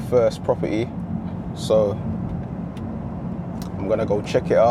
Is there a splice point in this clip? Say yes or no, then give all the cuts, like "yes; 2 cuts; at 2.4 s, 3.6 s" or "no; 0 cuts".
no; 0 cuts